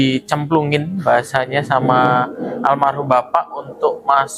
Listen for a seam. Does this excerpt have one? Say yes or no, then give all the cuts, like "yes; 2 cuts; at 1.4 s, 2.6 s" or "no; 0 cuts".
no; 0 cuts